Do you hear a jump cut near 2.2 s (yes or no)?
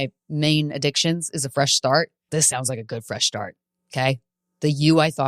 yes